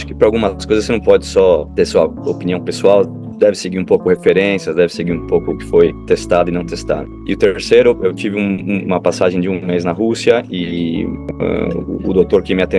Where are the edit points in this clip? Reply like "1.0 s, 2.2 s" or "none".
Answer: 1.7 s, 6.0 s, 7.1 s, 11.2 s